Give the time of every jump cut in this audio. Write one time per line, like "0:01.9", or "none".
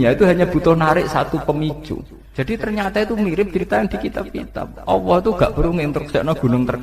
0:02.2